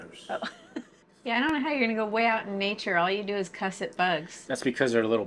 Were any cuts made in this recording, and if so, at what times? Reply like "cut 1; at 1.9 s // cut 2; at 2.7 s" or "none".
cut 1; at 1.0 s